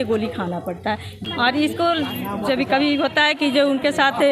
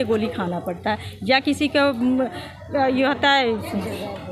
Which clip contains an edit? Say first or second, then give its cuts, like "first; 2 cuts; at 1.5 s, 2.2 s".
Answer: first; 1 cut; at 1.1 s